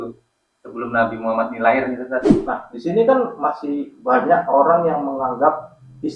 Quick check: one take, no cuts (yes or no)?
no